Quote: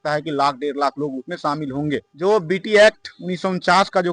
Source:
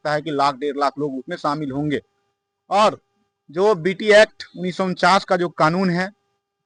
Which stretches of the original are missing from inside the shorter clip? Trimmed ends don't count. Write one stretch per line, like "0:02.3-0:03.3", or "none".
0:02.1-0:03.4